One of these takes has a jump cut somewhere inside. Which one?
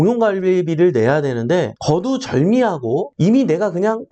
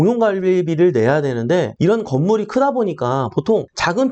first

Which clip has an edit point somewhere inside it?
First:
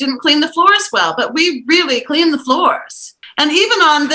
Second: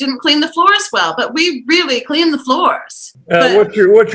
second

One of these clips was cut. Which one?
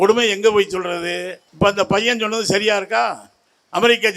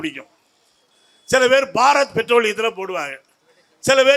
first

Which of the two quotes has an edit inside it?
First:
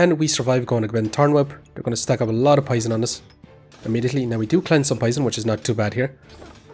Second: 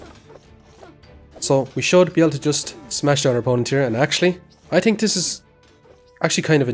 second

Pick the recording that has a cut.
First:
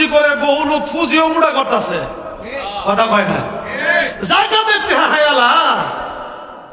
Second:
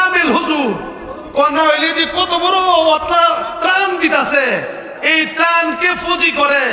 second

